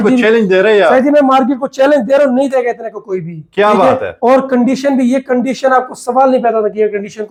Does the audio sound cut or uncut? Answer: uncut